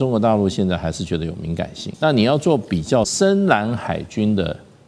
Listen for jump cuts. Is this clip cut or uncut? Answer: cut